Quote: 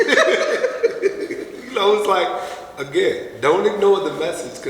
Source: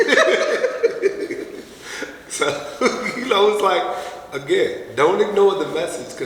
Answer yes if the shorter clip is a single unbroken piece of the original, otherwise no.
no